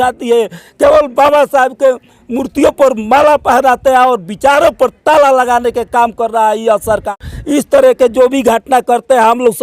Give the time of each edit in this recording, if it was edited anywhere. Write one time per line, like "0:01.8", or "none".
0:07.1